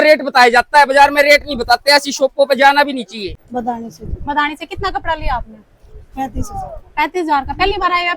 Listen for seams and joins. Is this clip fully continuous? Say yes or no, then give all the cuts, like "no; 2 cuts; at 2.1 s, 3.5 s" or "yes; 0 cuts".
no; 1 cut; at 3.4 s